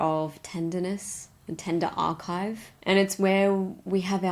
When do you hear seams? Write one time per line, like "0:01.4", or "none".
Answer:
0:02.8